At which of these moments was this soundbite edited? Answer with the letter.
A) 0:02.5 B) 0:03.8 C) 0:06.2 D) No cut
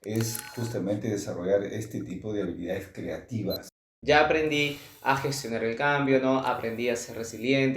B